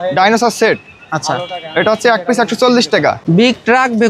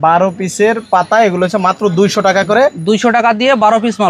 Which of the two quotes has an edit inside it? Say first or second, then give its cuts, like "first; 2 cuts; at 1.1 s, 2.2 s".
first; 1 cut; at 3.2 s